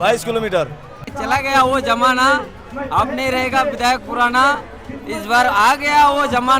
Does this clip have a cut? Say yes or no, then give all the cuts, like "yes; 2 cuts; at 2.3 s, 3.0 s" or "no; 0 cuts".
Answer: yes; 1 cut; at 1.0 s